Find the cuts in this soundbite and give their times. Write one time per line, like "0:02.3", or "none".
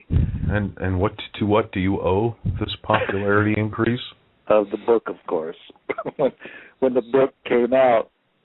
none